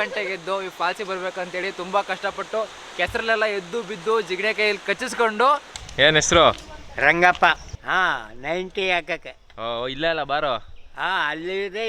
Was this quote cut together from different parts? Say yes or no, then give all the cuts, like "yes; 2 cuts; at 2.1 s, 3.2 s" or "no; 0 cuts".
yes; 2 cuts; at 5.6 s, 7.7 s